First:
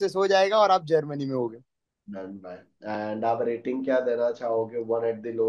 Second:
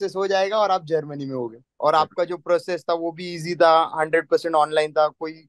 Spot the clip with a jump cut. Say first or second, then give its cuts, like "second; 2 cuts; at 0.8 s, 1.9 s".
second; 1 cut; at 1.6 s